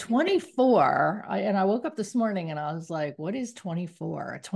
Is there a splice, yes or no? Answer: no